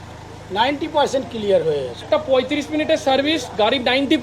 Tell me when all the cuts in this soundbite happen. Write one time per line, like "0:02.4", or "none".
0:02.0

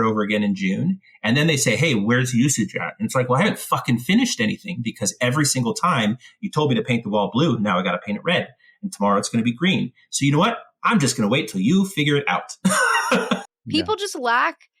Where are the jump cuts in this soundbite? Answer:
0:13.5

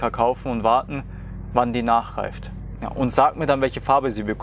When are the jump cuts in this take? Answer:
none

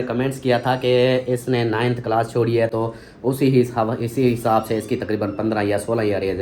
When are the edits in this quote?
none

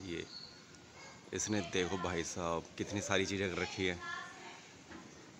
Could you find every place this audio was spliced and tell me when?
none

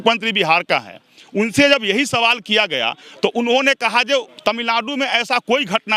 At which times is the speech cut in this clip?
0:04.3

